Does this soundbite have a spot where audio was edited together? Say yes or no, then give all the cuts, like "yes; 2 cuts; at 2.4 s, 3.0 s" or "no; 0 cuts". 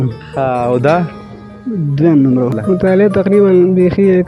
yes; 1 cut; at 2.6 s